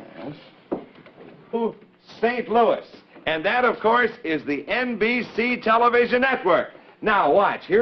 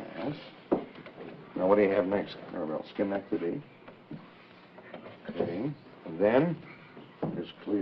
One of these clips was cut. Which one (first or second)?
second